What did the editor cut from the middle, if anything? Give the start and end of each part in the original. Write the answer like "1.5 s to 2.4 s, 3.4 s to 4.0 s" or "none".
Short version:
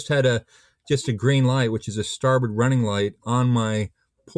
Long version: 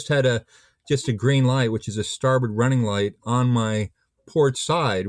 none

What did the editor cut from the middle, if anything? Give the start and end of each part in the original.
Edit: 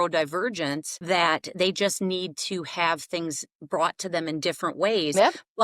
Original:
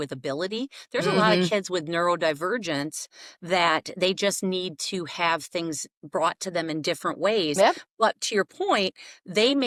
3.0 s to 3.3 s

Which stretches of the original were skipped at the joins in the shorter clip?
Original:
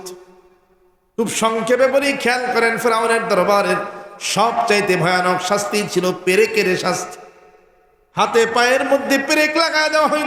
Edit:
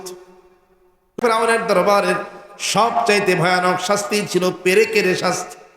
1.1 s to 2.7 s

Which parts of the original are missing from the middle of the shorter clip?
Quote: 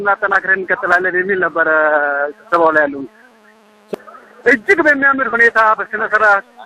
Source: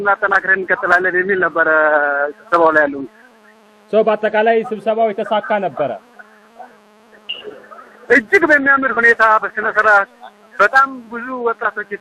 3.9 s to 7.6 s

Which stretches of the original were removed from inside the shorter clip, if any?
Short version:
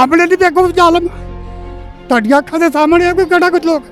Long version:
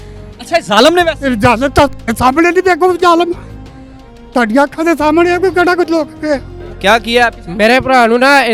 none

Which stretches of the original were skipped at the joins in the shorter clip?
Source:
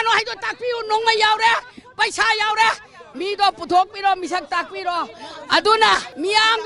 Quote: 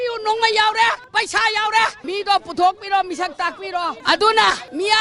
1.7 s to 1.9 s, 2.8 s to 3.1 s, 5.1 s to 5.4 s

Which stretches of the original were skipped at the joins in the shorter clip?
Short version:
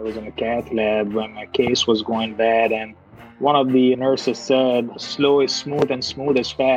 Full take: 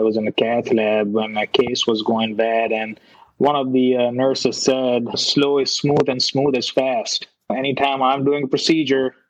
4.0 s to 4.1 s

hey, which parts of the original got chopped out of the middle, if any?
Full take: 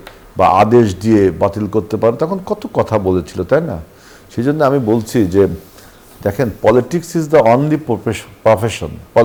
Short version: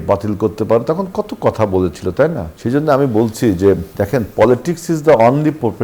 3.8 s to 4.2 s, 5.6 s to 6.2 s

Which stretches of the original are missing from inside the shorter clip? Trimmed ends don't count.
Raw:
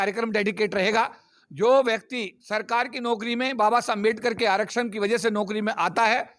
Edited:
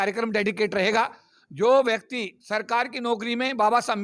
none

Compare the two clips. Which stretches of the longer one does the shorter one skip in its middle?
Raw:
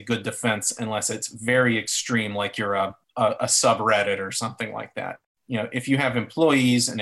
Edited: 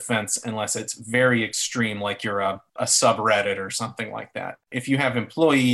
3.1 s to 3.4 s, 5.3 s to 5.7 s

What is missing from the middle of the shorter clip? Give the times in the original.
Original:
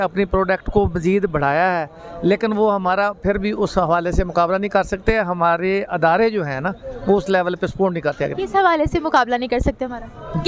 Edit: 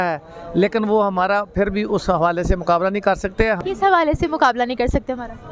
5.3 s to 8.3 s

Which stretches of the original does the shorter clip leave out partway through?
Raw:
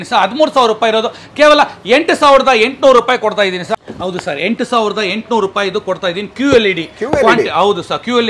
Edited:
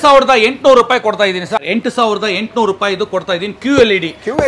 3.8 s to 4.4 s

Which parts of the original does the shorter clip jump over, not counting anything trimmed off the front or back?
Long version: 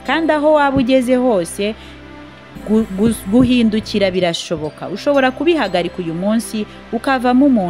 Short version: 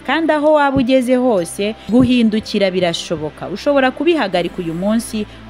1.8 s to 3.2 s

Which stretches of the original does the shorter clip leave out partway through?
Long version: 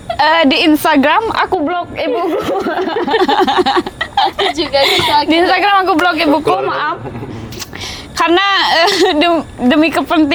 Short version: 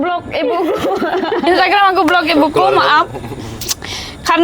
3.1 s to 5.4 s

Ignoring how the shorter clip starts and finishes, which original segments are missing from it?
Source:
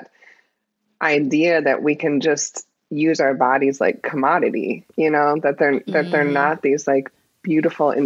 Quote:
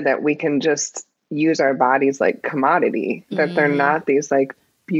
4.9 s to 5.8 s

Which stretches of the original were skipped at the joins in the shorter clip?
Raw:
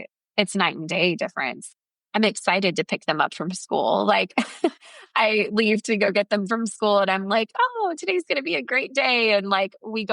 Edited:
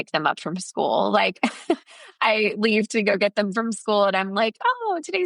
none

